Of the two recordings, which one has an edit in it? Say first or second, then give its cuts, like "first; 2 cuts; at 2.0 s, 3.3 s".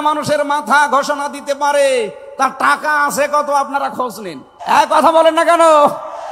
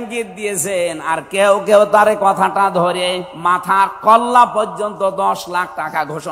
first; 1 cut; at 4.5 s